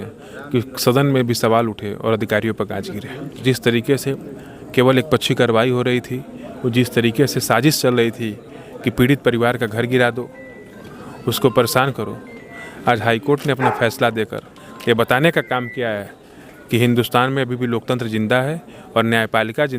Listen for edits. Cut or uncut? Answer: cut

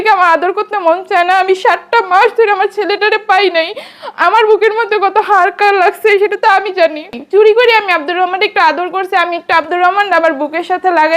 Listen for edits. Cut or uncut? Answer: cut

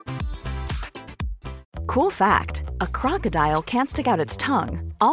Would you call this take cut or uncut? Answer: cut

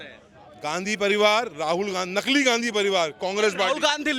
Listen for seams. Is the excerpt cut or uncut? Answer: uncut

